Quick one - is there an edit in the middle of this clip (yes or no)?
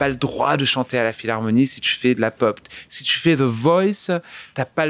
no